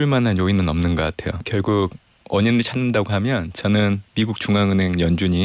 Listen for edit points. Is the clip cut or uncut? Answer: cut